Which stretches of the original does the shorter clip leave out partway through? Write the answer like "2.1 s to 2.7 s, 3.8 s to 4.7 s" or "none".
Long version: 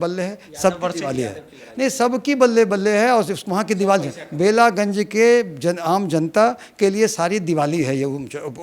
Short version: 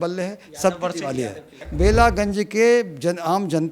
1.6 s to 4.2 s